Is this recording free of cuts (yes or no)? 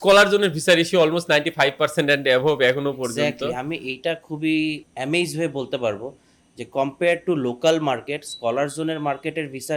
yes